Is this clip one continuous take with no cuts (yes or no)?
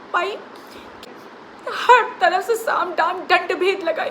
no